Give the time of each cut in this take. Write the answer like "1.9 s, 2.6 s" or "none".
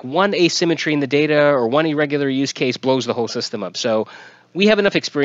none